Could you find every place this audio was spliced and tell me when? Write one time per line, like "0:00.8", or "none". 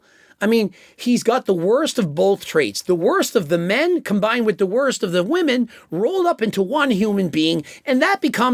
none